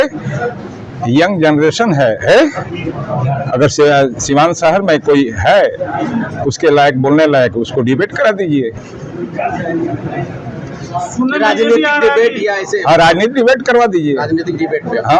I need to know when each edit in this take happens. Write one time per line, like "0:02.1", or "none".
none